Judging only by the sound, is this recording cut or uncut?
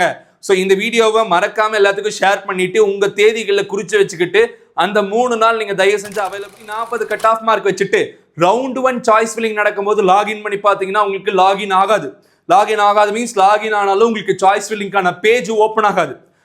cut